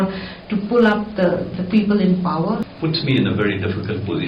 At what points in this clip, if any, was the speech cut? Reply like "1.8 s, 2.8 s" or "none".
2.7 s